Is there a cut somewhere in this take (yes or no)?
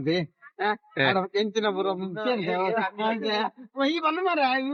no